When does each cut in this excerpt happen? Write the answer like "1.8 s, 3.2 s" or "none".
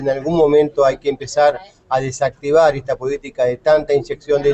3.3 s